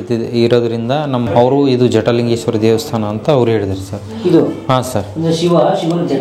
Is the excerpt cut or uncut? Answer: cut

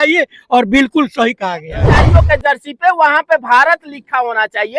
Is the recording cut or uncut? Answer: cut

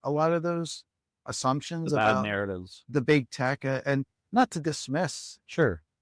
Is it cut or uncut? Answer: uncut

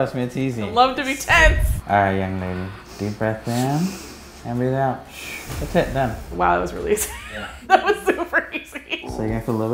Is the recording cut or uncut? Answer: uncut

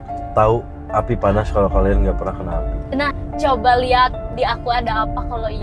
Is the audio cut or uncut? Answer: cut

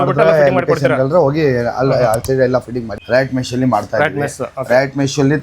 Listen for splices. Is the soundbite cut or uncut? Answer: cut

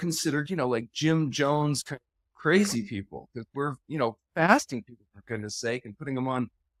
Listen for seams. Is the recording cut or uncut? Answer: uncut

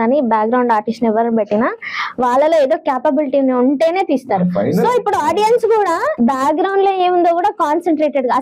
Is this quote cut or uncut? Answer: cut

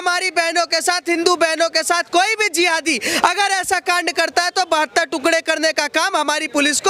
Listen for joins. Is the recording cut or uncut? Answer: uncut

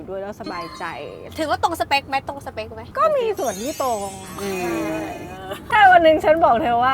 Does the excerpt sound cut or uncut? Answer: cut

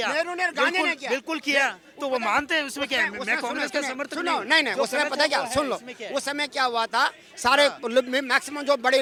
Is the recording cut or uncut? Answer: uncut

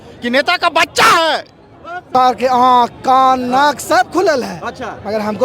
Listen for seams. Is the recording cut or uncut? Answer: cut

